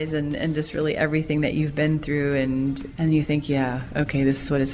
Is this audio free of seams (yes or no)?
no